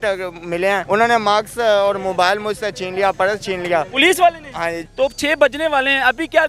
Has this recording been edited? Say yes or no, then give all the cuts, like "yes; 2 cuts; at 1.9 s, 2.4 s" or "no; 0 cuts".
yes; 2 cuts; at 0.8 s, 4.8 s